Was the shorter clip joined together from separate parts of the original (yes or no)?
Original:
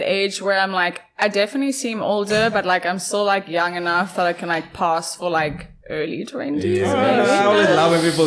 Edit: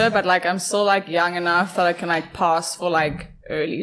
no